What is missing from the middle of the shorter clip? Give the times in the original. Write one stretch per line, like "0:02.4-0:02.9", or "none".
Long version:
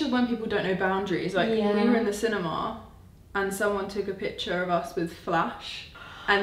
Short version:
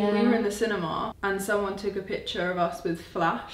0:02.7-0:03.2